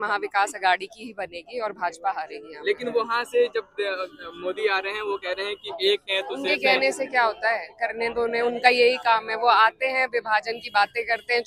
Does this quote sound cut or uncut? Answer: uncut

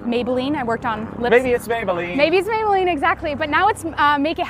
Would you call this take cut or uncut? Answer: uncut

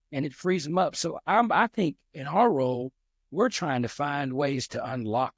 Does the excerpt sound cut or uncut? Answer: uncut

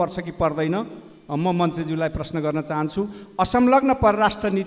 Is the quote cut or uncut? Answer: uncut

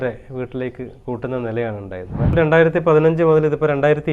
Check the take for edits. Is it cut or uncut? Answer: cut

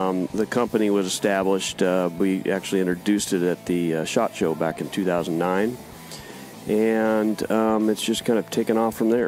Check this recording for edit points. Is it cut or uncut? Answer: uncut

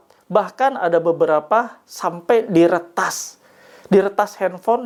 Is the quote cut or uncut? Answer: uncut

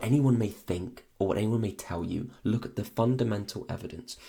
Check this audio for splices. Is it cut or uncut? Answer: uncut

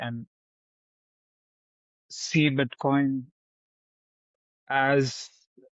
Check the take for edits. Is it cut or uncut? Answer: uncut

